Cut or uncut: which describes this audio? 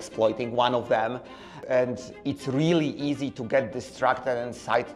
cut